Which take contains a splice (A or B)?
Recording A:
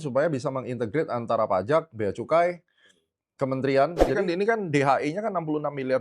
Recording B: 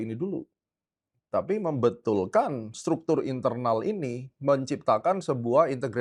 A